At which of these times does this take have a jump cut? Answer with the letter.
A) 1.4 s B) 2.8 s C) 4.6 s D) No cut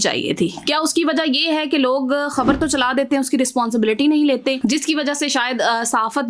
C